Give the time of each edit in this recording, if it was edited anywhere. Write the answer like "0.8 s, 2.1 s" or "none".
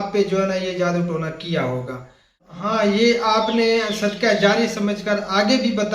2.5 s

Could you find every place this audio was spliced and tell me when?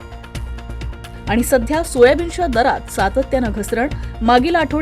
1.0 s

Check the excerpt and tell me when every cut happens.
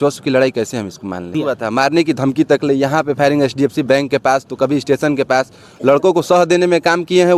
1.3 s, 5.7 s

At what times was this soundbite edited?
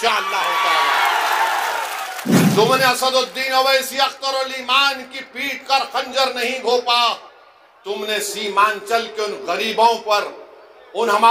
2.3 s

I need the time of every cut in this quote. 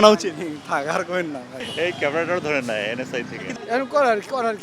1.6 s, 3.5 s

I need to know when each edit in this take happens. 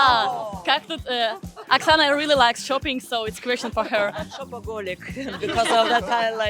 none

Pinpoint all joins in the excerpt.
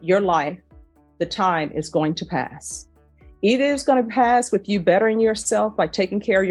none

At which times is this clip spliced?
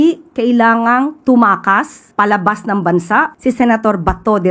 2.0 s, 3.3 s

